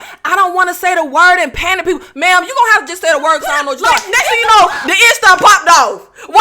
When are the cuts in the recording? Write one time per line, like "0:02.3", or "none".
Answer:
0:04.0